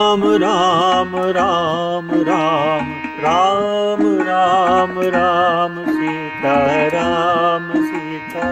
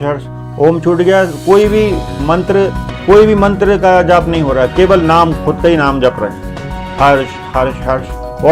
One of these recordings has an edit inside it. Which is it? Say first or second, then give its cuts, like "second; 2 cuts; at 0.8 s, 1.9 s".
second; 1 cut; at 2.9 s